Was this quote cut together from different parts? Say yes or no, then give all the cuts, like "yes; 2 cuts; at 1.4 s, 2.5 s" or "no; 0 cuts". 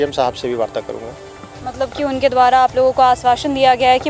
no; 0 cuts